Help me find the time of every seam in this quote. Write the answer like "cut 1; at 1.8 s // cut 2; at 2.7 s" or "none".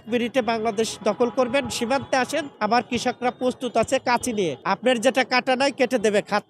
none